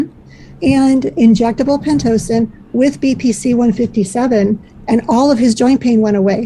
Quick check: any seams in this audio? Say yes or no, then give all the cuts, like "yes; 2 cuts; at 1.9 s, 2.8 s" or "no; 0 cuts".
no; 0 cuts